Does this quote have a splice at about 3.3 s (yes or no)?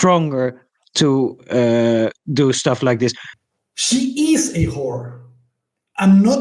yes